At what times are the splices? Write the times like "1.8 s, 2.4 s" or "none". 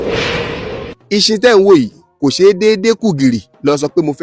0.9 s